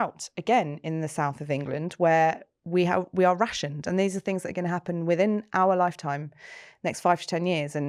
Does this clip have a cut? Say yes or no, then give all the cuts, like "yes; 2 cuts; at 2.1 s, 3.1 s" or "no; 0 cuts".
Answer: no; 0 cuts